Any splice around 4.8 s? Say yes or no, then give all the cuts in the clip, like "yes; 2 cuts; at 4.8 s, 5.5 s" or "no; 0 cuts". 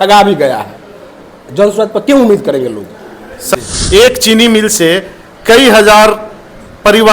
no; 1 cut; at 3.5 s